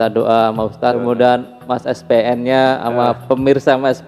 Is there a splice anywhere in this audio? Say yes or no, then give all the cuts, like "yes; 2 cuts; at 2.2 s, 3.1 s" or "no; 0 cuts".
yes; 1 cut; at 1.0 s